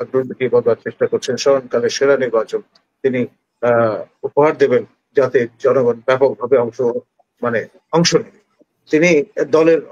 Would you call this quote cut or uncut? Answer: uncut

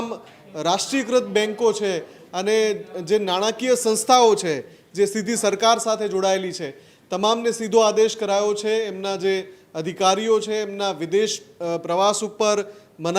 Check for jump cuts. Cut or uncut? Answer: uncut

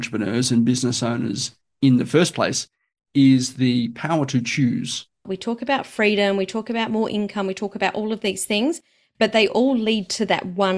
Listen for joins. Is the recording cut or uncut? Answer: cut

